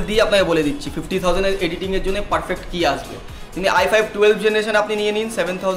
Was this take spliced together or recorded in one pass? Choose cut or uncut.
uncut